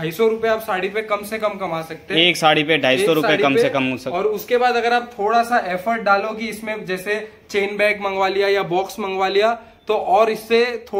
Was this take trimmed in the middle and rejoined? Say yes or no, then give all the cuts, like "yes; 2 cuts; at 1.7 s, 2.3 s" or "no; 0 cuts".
no; 0 cuts